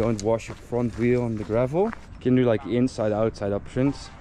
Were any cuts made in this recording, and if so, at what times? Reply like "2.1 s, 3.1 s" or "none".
2.1 s